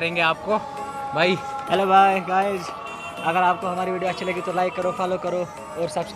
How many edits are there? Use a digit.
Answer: 0